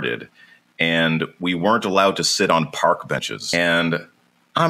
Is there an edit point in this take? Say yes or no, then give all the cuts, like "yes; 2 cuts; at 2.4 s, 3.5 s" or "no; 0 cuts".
yes; 1 cut; at 3.4 s